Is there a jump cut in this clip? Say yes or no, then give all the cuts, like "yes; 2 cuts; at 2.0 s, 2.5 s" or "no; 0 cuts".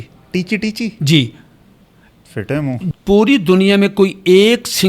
yes; 1 cut; at 2.9 s